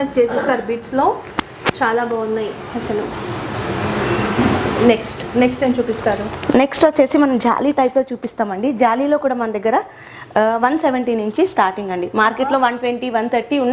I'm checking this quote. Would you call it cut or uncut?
uncut